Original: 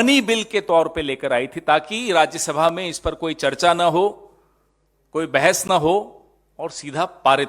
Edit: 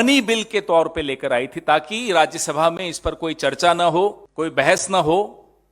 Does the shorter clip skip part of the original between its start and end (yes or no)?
yes